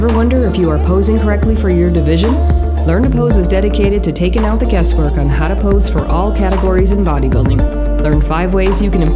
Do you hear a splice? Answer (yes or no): no